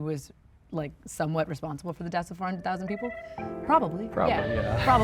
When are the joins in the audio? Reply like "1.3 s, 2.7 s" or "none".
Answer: none